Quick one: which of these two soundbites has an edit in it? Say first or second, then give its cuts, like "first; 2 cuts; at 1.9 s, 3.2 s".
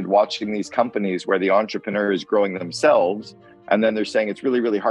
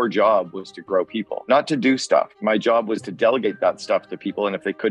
second; 2 cuts; at 1.3 s, 2.4 s